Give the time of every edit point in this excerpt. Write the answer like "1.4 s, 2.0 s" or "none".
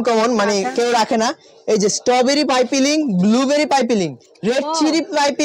none